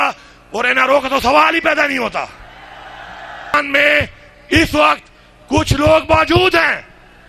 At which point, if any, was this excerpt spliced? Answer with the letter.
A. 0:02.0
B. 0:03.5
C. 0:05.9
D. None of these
B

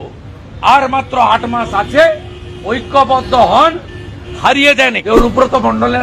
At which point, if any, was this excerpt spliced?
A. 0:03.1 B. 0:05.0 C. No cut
B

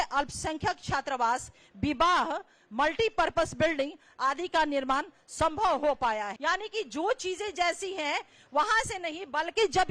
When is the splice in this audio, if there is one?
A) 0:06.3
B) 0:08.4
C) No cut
A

